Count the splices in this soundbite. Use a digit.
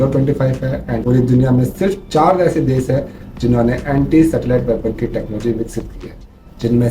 1